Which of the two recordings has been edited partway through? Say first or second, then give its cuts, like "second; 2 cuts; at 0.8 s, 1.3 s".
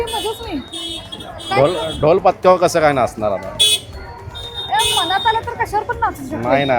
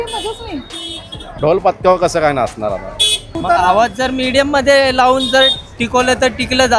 second; 2 cuts; at 1.3 s, 3.3 s